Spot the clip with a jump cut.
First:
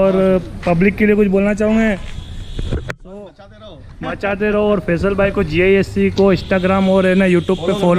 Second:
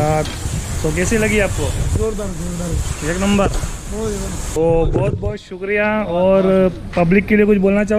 second; 1 cut; at 4.6 s

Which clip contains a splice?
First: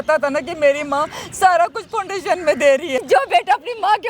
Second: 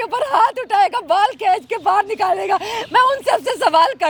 first; 1 cut; at 3.0 s

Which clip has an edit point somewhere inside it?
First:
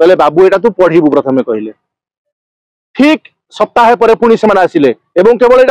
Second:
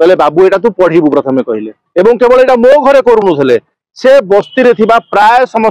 second; 1 cut; at 1.8 s

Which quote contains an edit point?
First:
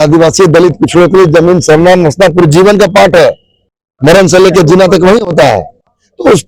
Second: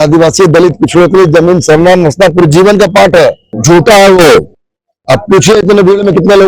second; 1 cut; at 3.5 s

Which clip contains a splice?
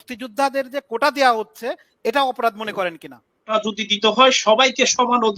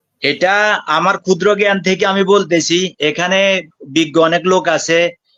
first; 1 cut; at 3.5 s

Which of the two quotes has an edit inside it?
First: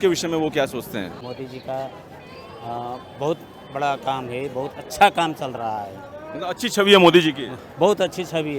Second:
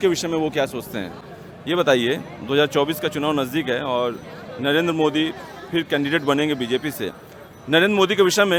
first; 1 cut; at 1.2 s

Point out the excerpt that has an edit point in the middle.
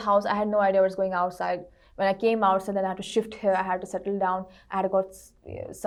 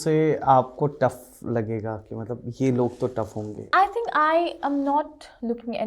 second; 1 cut; at 3.6 s

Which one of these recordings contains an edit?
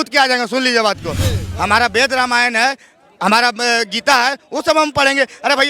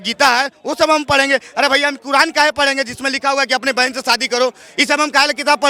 first; 1 cut; at 1.4 s

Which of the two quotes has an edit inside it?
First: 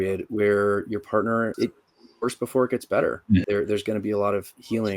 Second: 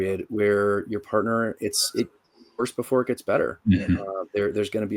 first; 2 cuts; at 1.5 s, 3.4 s

